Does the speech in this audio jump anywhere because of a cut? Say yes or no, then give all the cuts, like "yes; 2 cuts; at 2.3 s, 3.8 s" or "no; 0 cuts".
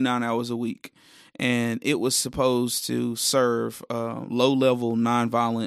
no; 0 cuts